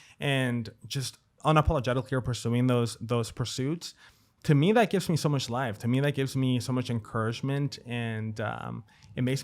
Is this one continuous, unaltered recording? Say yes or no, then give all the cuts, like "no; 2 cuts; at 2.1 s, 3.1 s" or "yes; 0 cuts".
no; 1 cut; at 1.3 s